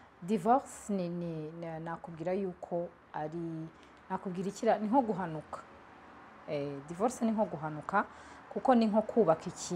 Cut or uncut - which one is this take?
uncut